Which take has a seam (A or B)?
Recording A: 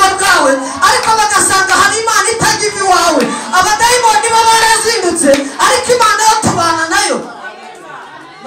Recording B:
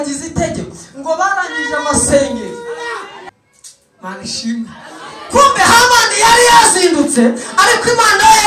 B